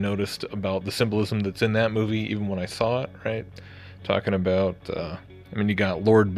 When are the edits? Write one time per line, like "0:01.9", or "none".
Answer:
0:05.1